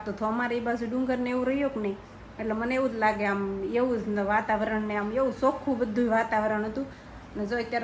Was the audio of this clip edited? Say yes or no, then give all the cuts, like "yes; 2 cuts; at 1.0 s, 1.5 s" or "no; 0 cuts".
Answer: no; 0 cuts